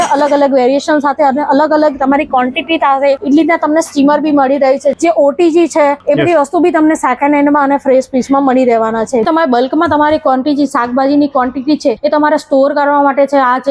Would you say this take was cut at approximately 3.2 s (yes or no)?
yes